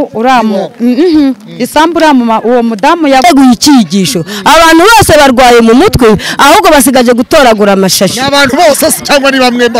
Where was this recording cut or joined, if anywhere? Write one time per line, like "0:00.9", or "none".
0:03.2